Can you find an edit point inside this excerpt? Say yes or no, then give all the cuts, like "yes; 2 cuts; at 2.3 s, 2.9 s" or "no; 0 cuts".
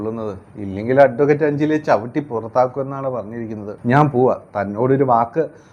yes; 1 cut; at 3.6 s